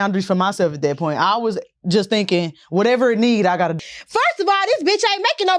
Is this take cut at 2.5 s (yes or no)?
no